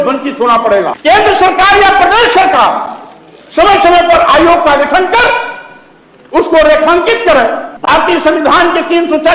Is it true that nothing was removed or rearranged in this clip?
no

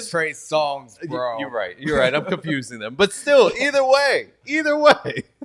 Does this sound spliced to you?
no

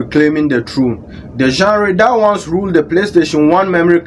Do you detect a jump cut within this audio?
no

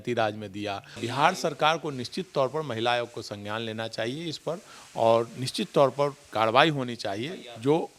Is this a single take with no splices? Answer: no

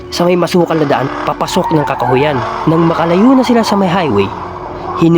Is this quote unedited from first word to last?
yes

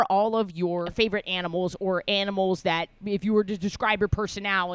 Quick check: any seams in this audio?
yes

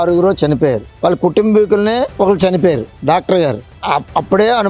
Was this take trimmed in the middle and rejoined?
yes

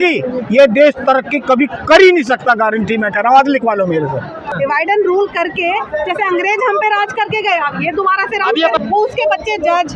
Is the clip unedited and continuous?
no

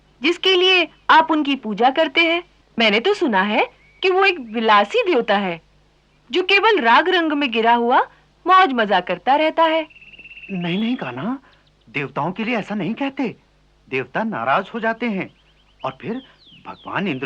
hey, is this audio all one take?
yes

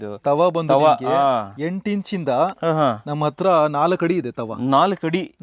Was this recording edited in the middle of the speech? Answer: no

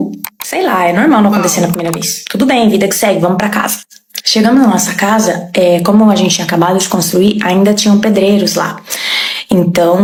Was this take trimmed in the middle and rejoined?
no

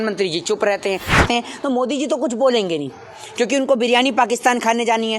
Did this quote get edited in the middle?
yes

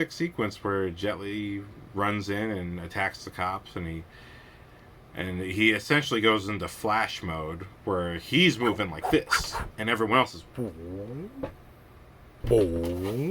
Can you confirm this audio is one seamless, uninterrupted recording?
no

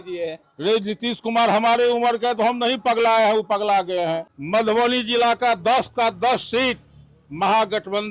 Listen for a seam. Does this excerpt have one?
yes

